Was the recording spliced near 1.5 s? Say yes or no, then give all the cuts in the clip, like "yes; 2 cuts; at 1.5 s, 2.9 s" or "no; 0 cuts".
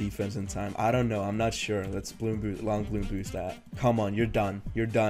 no; 1 cut; at 3.6 s